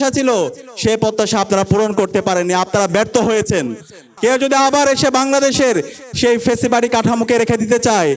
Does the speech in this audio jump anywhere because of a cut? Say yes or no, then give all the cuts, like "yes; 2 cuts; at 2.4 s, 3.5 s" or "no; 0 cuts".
yes; 1 cut; at 4.0 s